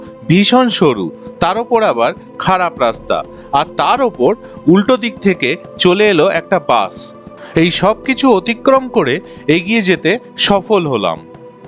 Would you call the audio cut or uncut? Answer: uncut